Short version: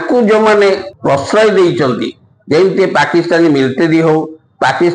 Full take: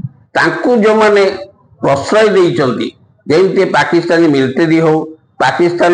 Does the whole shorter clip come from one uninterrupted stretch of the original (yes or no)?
no